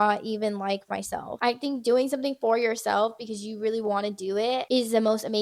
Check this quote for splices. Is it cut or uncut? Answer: cut